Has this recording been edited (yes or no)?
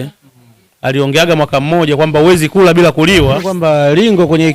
yes